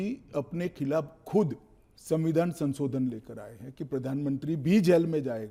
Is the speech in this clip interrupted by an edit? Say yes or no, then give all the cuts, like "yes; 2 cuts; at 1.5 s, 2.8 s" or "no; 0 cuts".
no; 0 cuts